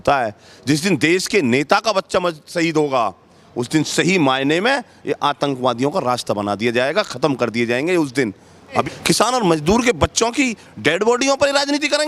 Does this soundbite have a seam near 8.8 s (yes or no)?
yes